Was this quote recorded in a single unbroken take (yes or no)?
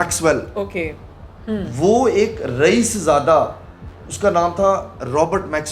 yes